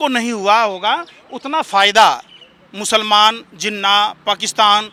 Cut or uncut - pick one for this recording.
uncut